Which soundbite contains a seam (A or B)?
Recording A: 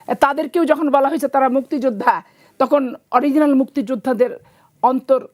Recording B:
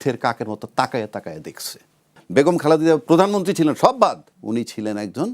B